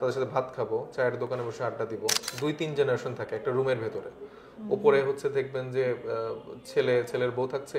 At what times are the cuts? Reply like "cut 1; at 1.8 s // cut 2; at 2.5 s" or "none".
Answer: cut 1; at 2.2 s